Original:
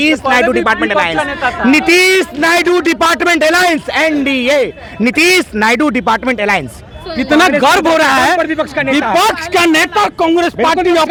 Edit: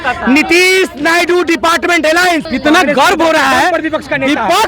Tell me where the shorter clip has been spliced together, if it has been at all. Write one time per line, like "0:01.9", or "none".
0:02.5